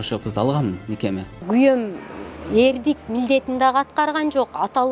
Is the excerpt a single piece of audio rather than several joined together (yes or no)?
no